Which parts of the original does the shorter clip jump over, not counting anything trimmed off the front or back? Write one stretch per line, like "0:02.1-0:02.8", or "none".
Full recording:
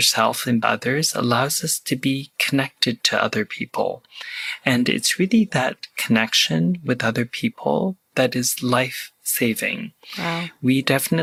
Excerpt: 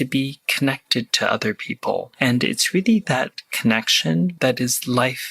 0:04.0-0:04.6
0:06.8-0:08.1